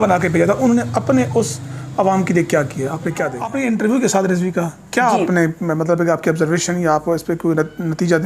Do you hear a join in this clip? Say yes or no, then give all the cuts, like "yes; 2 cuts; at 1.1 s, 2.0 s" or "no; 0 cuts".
yes; 1 cut; at 3.5 s